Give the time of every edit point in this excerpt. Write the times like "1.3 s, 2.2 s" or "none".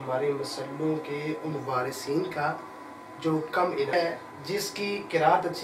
3.9 s